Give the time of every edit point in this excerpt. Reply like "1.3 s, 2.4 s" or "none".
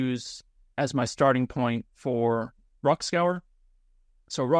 none